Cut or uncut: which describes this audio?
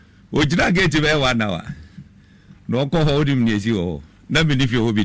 uncut